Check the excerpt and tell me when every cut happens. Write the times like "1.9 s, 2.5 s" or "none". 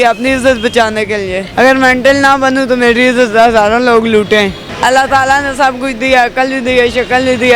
1.4 s, 4.6 s